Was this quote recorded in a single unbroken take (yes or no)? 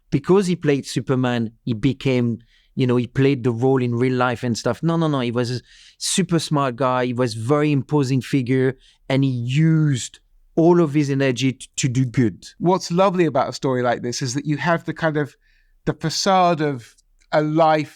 no